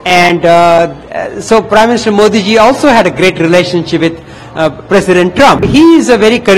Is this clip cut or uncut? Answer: cut